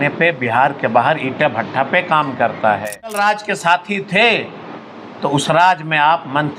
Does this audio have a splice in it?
yes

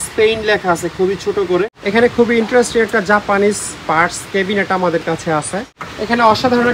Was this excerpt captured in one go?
no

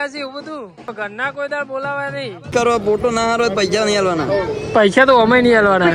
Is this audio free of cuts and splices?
no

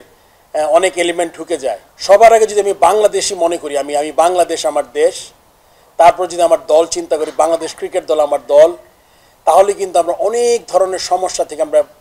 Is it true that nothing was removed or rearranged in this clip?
no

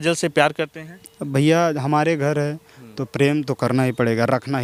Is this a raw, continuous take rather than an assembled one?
yes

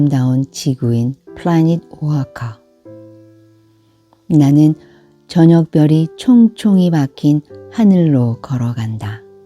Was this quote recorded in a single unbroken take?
no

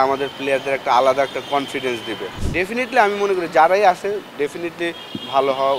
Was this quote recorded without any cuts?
no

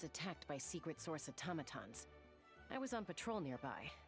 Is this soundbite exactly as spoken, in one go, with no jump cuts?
yes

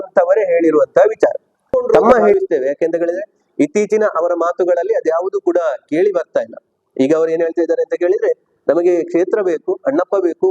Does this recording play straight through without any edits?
no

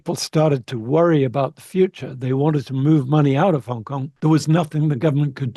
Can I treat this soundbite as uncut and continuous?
yes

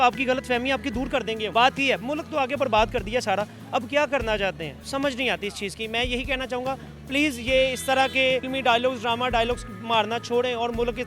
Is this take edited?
no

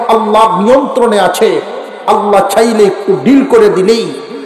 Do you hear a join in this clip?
no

